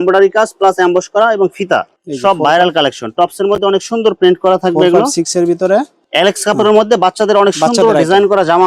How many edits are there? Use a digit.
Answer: 2